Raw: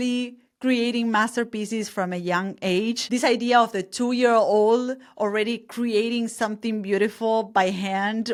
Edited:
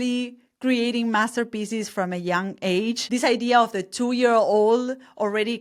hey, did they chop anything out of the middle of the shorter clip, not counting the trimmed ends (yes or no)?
no